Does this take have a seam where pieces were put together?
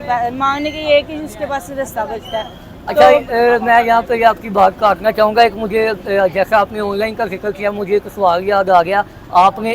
no; 0 cuts

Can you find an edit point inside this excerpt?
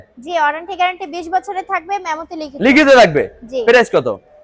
no; 0 cuts

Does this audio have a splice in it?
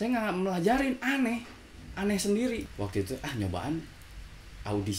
yes; 1 cut; at 2.7 s

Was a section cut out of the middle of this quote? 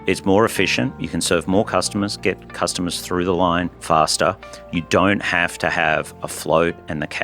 yes; 2 cuts; at 1.0 s, 3.8 s

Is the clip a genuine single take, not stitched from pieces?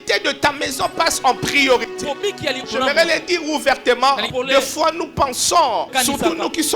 no; 3 cuts; at 2.6 s, 4.3 s, 5.9 s

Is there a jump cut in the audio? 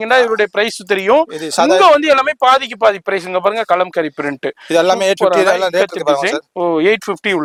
no; 0 cuts

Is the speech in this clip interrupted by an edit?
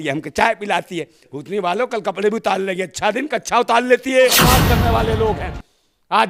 yes; 1 cut; at 4.4 s

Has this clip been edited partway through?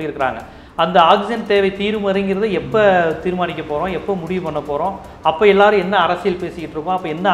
no; 0 cuts

